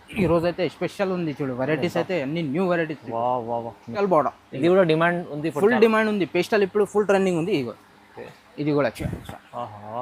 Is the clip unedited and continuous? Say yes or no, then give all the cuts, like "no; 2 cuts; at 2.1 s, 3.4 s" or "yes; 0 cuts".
no; 1 cut; at 3.9 s